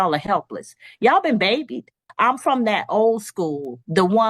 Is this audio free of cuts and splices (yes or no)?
no